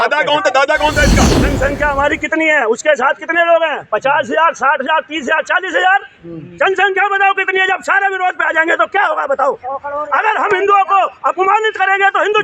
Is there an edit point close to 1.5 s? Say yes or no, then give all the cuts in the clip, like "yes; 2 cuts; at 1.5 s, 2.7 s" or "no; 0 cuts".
yes; 1 cut; at 1.5 s